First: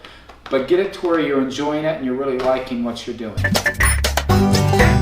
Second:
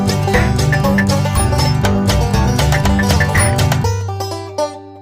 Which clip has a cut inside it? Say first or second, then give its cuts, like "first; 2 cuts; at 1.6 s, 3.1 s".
first; 1 cut; at 3.4 s